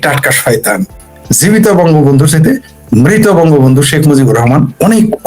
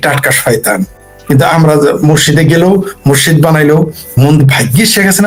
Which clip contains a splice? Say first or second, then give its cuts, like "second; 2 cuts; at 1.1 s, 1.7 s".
first; 1 cut; at 1.1 s